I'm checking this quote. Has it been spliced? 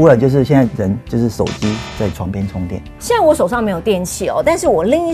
yes; 1 cut; at 3.0 s

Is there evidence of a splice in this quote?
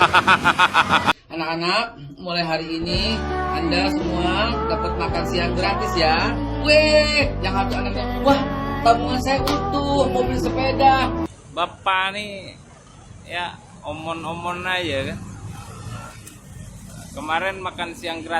yes; 2 cuts; at 1.3 s, 11.3 s

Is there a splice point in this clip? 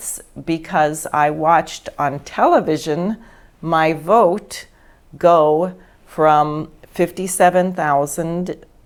no; 0 cuts

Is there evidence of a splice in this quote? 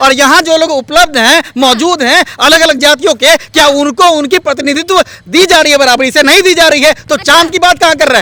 no; 0 cuts

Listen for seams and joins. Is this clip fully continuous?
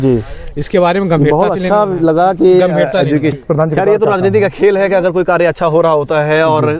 no; 1 cut; at 3.4 s

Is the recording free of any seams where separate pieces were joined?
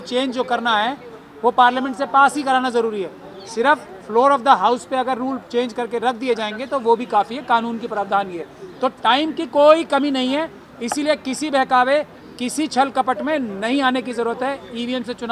yes; 0 cuts

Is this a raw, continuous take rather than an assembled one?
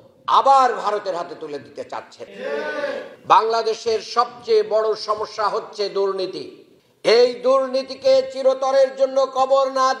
no; 1 cut; at 3.1 s

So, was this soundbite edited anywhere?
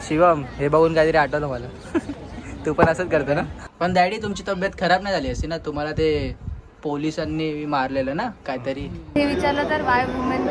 yes; 2 cuts; at 3.6 s, 9.2 s

